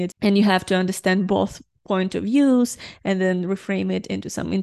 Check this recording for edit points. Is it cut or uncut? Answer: uncut